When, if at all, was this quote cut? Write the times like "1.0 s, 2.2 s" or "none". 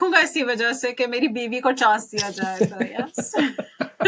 none

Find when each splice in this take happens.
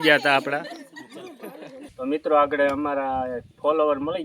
1.9 s

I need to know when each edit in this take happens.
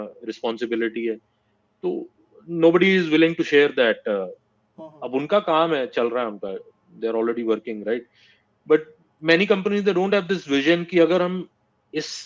none

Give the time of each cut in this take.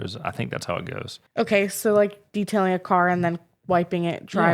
1.2 s

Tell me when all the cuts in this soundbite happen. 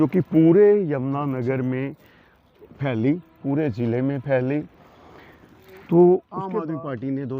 6.4 s

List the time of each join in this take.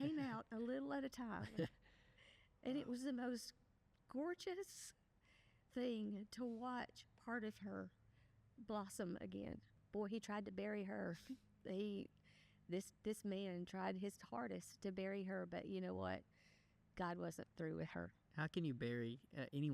9.8 s, 18.2 s

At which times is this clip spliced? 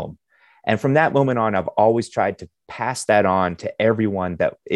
none

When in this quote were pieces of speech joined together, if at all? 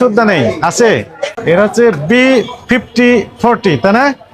1.2 s

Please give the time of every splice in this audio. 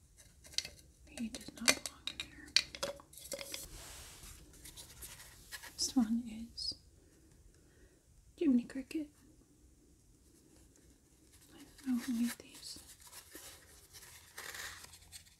3.7 s

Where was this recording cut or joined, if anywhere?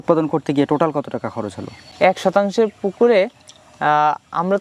none

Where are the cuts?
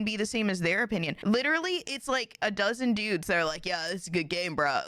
1.1 s, 2.4 s

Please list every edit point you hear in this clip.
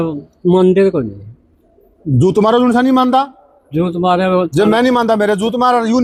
none

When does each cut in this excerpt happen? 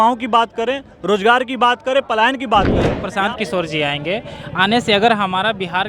3.0 s

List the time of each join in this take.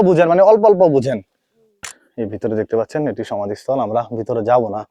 1.8 s

